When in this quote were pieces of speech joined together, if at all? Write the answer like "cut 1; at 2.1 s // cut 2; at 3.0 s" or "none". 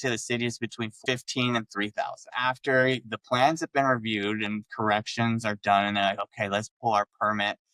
cut 1; at 1.0 s // cut 2; at 2.3 s